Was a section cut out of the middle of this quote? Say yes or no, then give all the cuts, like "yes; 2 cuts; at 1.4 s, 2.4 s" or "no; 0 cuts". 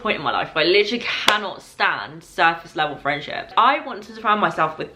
yes; 1 cut; at 3.5 s